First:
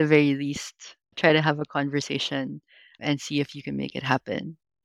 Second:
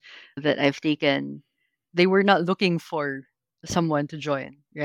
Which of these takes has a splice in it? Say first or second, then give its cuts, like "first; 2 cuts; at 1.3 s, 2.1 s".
second; 1 cut; at 1.8 s